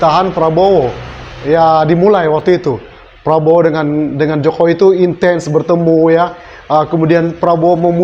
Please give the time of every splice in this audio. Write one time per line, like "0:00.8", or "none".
none